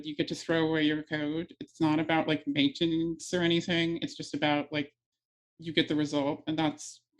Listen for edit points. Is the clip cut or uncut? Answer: uncut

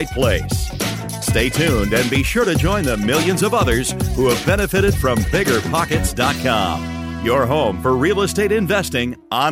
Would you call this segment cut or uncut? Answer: uncut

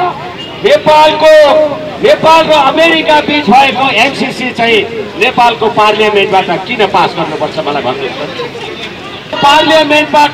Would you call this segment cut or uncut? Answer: uncut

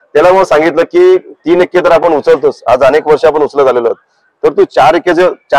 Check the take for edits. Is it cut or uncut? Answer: uncut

